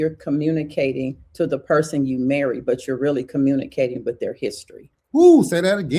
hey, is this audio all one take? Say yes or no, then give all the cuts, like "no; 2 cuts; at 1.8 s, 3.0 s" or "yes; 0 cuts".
yes; 0 cuts